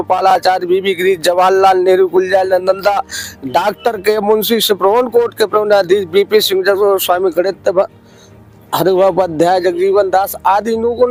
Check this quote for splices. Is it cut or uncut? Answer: uncut